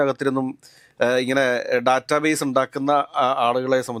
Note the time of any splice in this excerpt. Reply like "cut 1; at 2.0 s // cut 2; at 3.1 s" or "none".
none